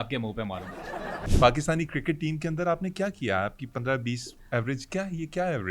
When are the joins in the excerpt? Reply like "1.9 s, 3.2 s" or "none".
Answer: 1.2 s